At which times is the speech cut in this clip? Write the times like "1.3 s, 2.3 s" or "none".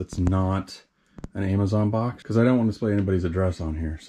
2.2 s